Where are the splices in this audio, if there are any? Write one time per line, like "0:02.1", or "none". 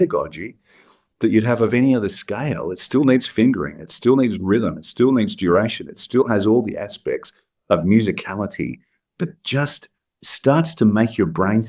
none

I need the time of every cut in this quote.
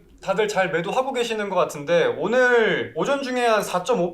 0:02.9

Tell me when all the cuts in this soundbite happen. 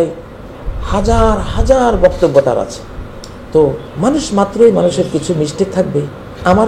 0:03.9

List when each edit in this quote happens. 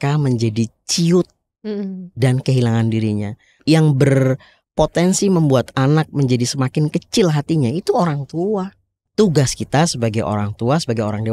0:03.6
0:08.9

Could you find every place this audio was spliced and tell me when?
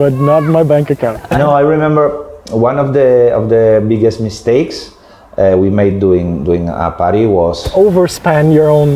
0:01.2
0:07.6

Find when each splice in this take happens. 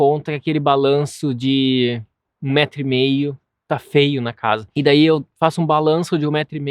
0:04.7

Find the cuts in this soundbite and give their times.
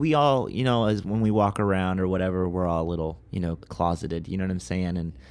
none

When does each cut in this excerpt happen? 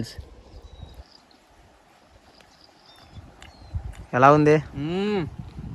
0:01.0

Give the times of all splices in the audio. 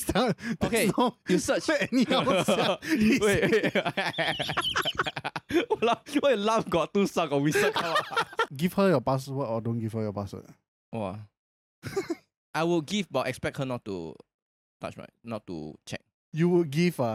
0:08.4
0:12.3

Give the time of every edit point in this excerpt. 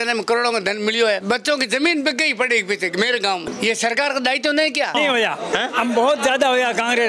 0:01.2
0:03.5
0:04.9

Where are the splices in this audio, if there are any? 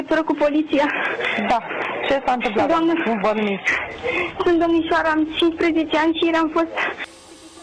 none

